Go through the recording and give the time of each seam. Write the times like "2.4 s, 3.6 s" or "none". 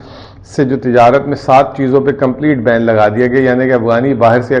none